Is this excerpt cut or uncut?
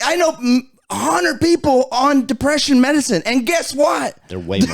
uncut